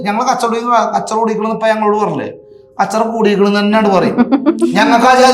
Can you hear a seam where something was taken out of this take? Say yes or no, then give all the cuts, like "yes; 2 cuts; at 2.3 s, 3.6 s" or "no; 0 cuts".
no; 0 cuts